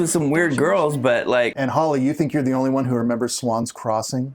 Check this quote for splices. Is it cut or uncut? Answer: cut